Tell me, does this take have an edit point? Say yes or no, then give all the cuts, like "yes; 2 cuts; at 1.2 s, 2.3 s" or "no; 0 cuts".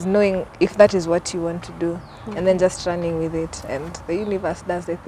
no; 0 cuts